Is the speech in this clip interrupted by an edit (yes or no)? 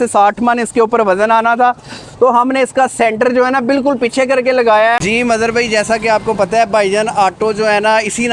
yes